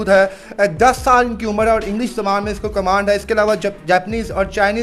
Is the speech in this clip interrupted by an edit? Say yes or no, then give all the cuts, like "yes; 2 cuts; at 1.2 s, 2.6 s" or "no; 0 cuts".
no; 0 cuts